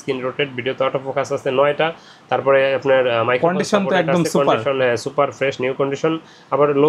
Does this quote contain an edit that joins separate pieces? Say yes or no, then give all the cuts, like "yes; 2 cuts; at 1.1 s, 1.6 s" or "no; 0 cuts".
no; 0 cuts